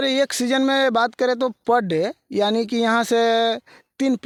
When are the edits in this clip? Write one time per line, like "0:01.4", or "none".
none